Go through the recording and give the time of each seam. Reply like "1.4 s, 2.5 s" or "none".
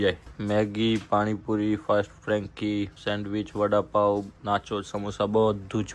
none